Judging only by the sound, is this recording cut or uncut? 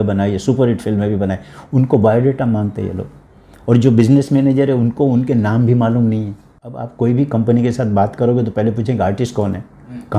cut